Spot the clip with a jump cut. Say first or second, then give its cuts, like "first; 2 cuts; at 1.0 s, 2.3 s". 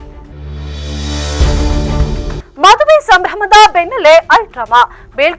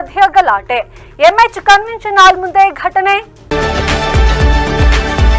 second; 1 cut; at 3.4 s